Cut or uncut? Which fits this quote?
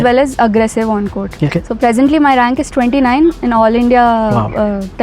cut